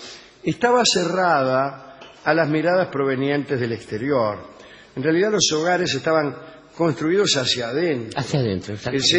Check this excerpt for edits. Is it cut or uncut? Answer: cut